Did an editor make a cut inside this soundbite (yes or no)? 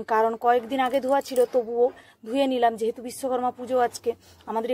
no